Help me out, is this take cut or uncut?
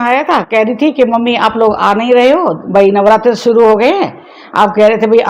uncut